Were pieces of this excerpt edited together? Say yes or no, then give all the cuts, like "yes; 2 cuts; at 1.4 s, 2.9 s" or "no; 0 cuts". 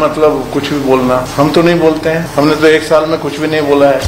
yes; 2 cuts; at 1.3 s, 2.3 s